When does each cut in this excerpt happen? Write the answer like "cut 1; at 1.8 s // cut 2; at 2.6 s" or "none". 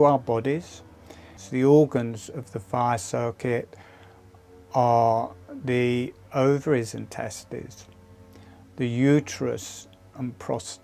cut 1; at 1.3 s